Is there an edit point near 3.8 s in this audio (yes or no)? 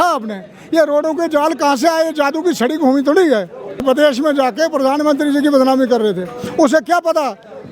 yes